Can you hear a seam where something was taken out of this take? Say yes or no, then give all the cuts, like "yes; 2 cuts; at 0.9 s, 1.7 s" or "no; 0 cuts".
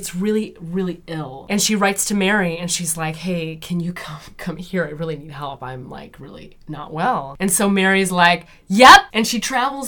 yes; 2 cuts; at 1.3 s, 9.1 s